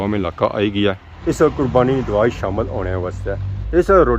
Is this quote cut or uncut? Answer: uncut